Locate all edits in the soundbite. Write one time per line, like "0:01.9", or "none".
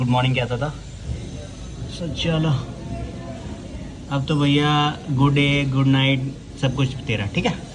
none